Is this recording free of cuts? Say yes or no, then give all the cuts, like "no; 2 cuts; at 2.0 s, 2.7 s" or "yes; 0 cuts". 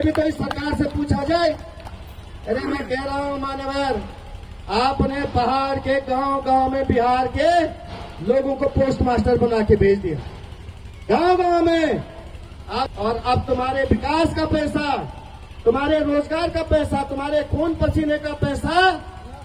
yes; 0 cuts